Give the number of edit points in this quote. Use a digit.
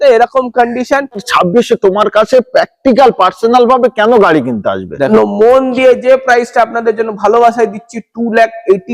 2